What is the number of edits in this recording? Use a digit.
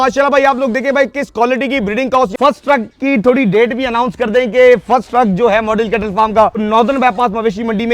2